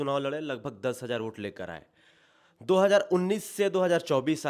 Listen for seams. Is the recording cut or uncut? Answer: uncut